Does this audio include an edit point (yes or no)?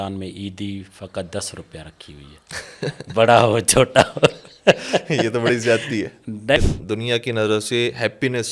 yes